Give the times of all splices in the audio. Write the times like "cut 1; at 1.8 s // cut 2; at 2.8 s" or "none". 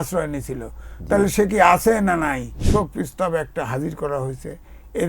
cut 1; at 2.5 s